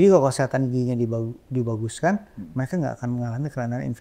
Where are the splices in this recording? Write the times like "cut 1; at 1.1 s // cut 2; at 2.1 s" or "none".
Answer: none